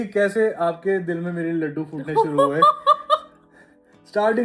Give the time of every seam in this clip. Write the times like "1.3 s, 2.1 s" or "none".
none